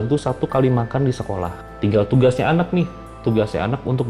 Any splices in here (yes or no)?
yes